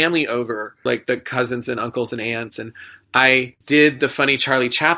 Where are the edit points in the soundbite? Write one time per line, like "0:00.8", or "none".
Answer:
0:00.9
0:03.6